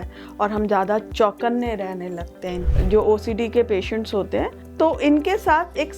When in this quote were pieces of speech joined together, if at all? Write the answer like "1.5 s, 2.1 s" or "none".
2.7 s, 4.6 s